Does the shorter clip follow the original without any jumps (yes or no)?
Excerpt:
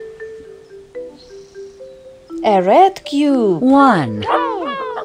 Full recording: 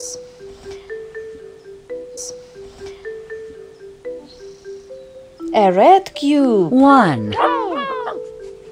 no